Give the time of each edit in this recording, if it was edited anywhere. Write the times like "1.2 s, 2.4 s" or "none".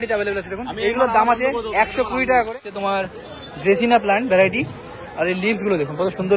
2.7 s